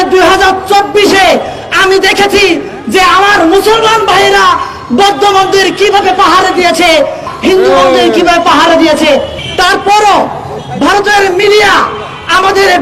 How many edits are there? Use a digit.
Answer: 2